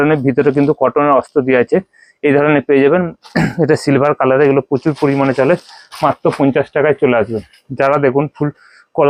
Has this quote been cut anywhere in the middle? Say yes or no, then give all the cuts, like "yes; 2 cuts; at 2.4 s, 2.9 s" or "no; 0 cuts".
no; 0 cuts